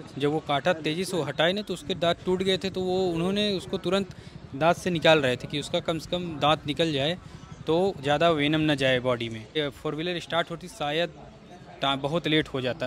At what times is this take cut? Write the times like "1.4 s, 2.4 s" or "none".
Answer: 9.6 s